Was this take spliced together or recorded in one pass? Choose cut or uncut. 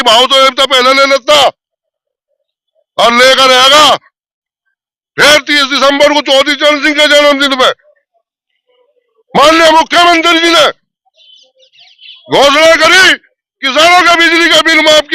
uncut